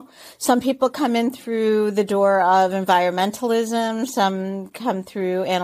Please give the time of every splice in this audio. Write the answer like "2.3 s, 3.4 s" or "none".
none